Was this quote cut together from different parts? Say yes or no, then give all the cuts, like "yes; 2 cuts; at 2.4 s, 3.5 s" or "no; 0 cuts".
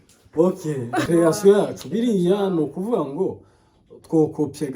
yes; 1 cut; at 1.1 s